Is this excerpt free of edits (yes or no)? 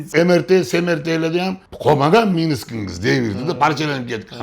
no